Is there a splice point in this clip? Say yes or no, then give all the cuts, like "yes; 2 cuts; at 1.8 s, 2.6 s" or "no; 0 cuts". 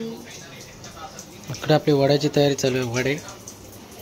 no; 0 cuts